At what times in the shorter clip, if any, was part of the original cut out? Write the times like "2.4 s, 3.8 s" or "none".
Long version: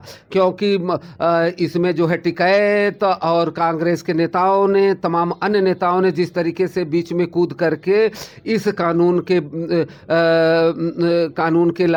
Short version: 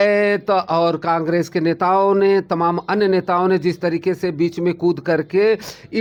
none